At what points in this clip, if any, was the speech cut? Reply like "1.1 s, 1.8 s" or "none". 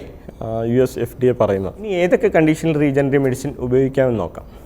1.9 s